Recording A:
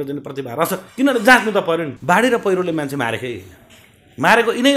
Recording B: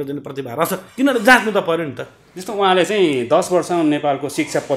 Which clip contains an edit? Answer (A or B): A